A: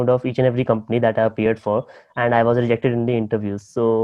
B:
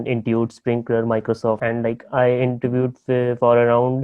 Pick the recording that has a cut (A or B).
B